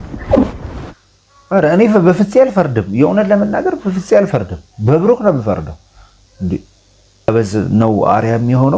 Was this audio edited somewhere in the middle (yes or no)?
yes